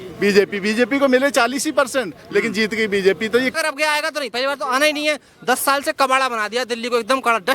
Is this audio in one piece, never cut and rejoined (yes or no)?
no